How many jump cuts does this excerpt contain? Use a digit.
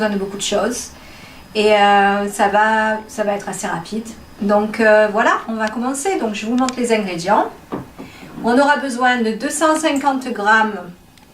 1